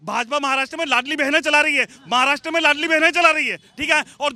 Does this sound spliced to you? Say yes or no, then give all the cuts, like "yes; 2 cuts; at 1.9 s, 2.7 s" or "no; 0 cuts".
no; 0 cuts